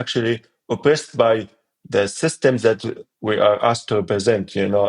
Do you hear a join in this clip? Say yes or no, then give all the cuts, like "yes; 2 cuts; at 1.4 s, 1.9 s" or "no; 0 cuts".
no; 0 cuts